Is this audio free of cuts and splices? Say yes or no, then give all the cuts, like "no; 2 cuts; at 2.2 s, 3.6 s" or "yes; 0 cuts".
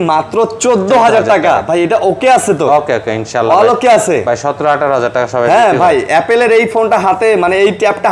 yes; 0 cuts